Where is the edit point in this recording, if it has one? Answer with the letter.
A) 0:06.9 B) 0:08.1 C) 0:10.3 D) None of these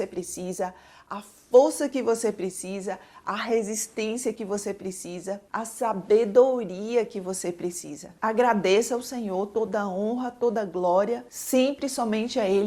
B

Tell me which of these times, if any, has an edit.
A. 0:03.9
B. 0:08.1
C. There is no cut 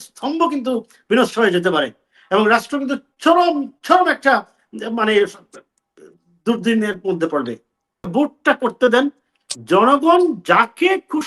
B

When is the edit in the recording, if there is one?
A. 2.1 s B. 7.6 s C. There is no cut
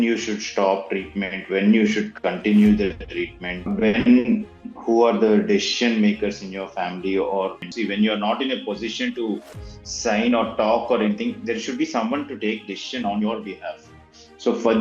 B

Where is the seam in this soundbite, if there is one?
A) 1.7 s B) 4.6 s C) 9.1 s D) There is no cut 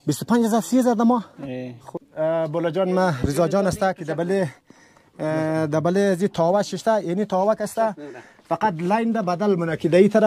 A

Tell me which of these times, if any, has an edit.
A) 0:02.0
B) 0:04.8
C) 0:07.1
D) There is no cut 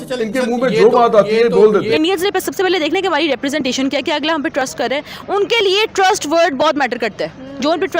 A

